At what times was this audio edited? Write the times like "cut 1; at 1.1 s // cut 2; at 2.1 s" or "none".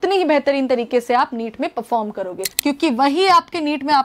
cut 1; at 2.4 s